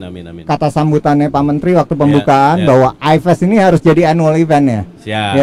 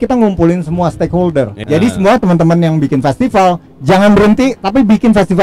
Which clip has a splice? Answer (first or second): second